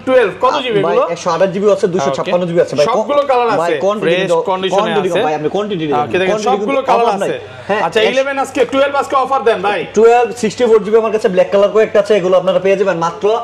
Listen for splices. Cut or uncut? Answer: uncut